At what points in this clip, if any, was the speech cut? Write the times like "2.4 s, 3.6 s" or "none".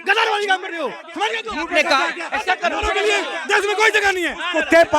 none